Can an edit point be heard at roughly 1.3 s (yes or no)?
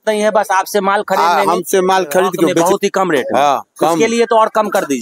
no